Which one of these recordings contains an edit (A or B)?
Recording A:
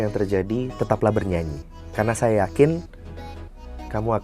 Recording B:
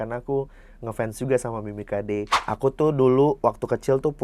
B